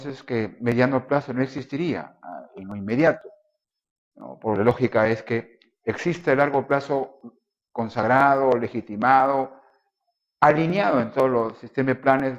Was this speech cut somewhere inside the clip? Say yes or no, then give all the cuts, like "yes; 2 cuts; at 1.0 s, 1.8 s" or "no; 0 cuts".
no; 0 cuts